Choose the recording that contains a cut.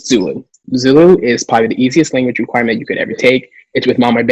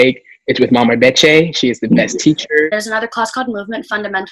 second; 1 cut; at 2.7 s

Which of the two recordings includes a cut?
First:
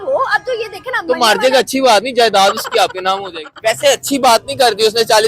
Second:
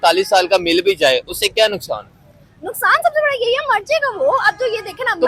first; 1 cut; at 3.8 s

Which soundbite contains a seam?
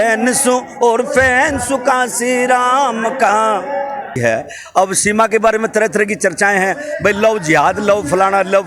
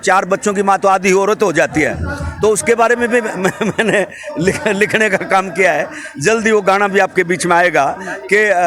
first; 1 cut; at 4.2 s

